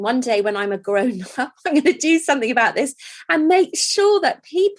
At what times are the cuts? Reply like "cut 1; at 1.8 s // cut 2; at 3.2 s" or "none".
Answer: none